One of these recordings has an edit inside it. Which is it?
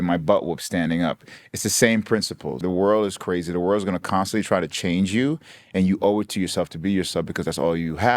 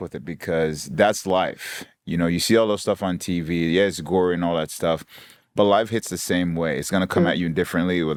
first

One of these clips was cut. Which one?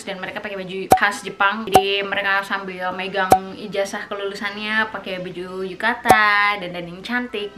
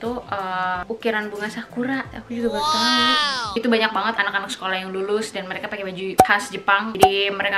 second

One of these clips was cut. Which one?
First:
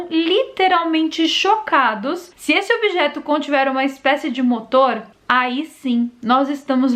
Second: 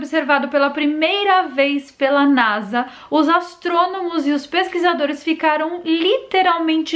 first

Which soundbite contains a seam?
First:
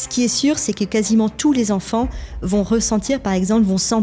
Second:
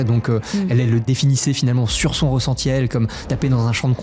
second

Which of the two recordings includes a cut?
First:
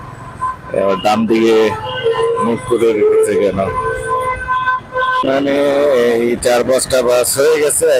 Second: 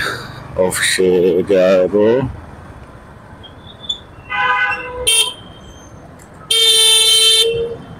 first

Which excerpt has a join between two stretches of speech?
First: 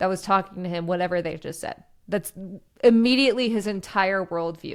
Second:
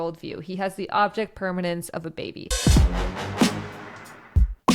second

